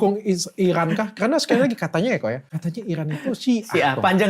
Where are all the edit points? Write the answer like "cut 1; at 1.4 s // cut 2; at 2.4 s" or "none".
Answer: cut 1; at 2.5 s

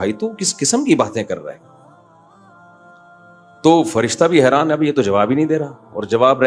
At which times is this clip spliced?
none

